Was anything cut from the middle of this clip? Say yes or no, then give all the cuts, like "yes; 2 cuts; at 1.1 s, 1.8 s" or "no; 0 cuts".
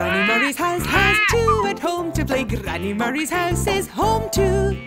no; 0 cuts